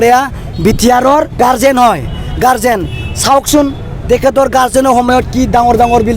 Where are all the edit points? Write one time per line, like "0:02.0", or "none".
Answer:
0:01.4